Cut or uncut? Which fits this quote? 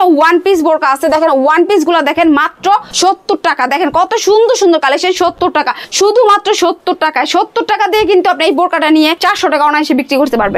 cut